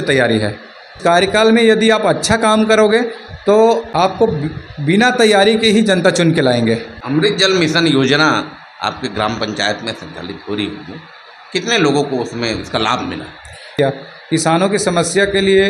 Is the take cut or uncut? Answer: cut